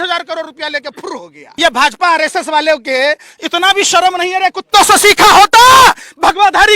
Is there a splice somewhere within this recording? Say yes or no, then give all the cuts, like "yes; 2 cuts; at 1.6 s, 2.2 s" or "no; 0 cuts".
yes; 1 cut; at 1.4 s